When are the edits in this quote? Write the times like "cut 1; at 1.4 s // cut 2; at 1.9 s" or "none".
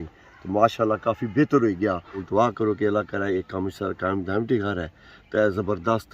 cut 1; at 2.2 s